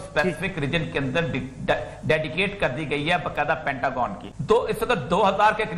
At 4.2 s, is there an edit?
yes; 1 cut; at 4.2 s

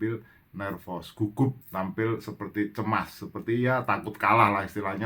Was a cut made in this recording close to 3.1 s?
no; 1 cut; at 1.6 s

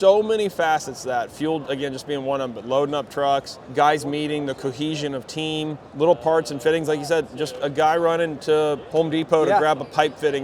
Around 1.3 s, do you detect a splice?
no; 3 cuts; at 3.6 s, 5.8 s, 8.8 s

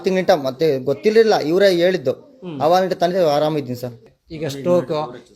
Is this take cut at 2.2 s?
no; 1 cut; at 4.0 s

